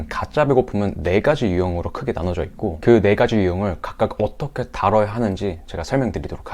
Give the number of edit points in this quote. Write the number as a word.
zero